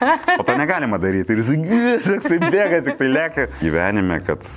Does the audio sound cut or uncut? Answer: cut